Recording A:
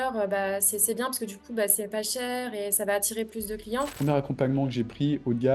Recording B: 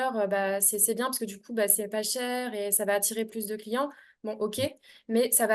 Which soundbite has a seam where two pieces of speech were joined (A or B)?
A